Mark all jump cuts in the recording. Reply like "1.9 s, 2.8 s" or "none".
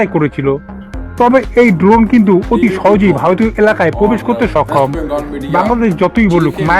5.3 s